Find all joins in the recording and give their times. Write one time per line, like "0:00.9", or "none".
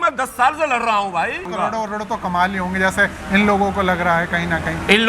0:01.5